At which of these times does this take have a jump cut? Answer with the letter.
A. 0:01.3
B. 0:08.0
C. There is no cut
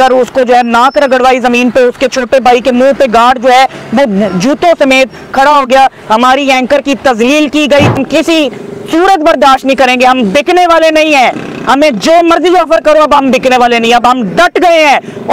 B